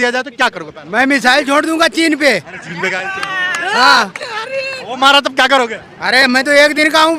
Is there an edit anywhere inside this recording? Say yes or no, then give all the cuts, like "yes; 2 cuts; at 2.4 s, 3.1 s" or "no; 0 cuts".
no; 0 cuts